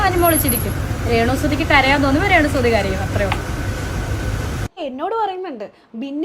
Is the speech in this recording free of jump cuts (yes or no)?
no